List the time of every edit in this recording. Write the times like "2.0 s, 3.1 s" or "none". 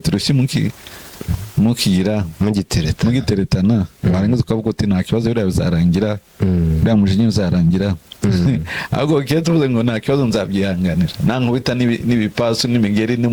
none